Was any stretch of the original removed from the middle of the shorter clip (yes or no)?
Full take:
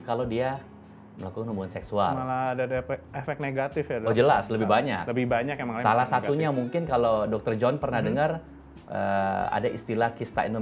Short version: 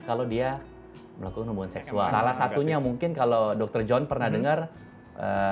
yes